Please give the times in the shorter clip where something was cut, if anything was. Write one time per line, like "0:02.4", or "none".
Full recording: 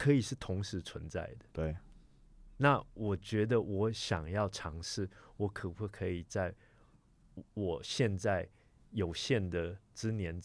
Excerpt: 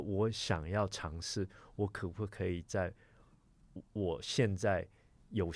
none